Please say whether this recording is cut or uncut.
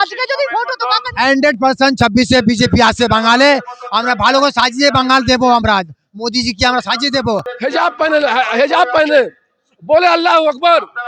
cut